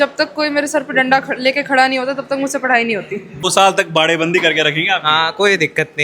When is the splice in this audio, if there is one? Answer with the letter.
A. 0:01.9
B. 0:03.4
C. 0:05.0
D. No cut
B